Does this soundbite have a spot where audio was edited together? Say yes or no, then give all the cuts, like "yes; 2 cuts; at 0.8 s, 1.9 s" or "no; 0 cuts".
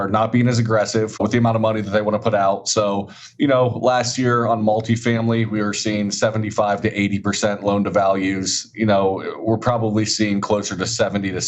no; 0 cuts